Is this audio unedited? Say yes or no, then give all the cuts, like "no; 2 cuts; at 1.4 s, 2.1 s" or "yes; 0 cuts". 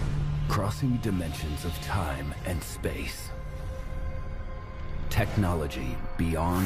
yes; 0 cuts